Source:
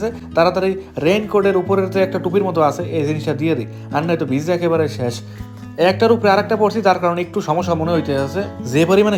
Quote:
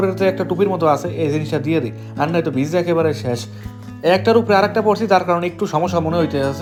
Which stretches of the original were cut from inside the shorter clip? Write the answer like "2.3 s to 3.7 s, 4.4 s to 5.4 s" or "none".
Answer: none